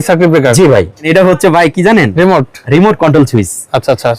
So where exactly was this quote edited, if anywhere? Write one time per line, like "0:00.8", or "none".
0:01.1